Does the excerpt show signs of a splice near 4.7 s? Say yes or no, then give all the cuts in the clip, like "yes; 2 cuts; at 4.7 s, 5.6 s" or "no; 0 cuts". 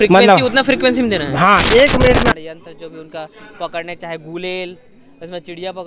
no; 1 cut; at 2.3 s